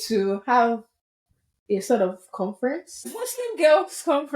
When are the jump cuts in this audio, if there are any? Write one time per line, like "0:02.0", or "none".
0:03.2